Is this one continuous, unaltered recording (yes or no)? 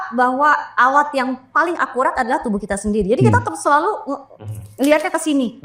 yes